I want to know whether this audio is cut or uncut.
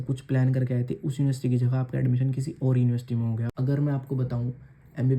cut